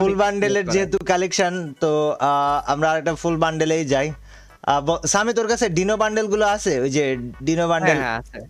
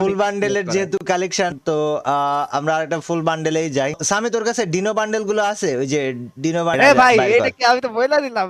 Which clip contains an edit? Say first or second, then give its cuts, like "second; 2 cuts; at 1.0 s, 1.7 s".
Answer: second; 3 cuts; at 1.6 s, 4.0 s, 6.8 s